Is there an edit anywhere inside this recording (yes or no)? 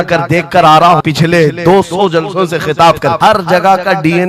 yes